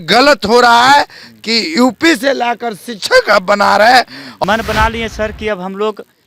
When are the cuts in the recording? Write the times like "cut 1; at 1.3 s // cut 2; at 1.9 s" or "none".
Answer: cut 1; at 4.2 s